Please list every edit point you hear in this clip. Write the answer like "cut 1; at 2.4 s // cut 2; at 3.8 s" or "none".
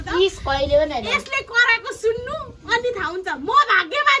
none